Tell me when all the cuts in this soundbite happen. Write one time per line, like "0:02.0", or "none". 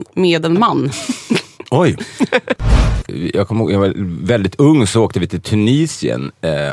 0:02.7